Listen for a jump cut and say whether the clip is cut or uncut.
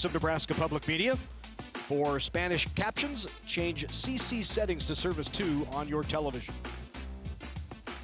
uncut